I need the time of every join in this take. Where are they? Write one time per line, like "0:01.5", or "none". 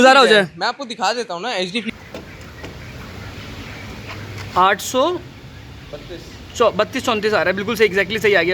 0:01.9